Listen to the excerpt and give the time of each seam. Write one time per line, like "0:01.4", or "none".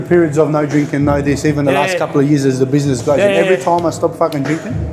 none

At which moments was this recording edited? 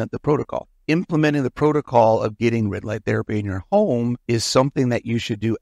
0:04.2

